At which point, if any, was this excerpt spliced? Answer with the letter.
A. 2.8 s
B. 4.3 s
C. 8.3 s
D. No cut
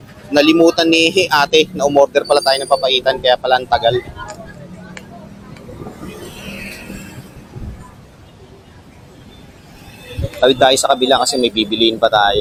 D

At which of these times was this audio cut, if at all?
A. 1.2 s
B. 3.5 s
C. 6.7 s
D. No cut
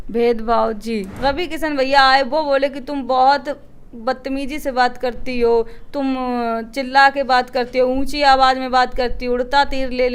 A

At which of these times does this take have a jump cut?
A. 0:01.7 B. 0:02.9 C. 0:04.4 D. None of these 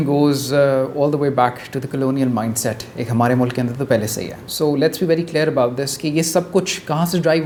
D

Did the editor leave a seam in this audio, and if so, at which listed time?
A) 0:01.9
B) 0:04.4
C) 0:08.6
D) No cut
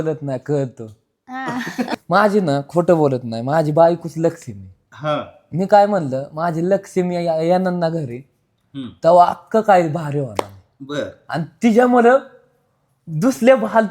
A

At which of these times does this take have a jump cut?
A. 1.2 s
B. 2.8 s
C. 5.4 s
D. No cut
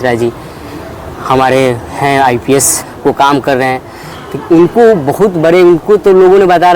B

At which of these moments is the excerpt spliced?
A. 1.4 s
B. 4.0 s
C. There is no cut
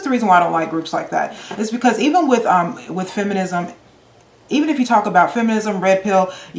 C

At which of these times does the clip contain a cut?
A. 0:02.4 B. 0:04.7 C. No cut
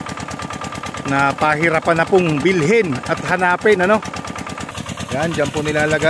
B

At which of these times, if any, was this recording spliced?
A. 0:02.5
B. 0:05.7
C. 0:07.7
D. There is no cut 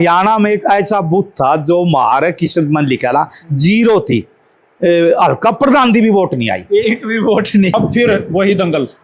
C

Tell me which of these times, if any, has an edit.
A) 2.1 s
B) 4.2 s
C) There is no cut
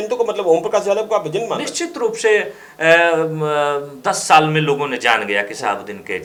C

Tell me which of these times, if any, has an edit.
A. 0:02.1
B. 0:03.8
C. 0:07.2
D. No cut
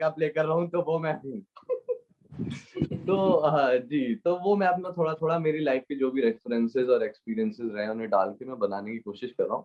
D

